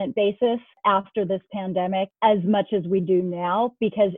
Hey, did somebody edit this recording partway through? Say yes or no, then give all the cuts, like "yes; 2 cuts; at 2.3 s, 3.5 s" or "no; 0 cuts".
yes; 1 cut; at 2.1 s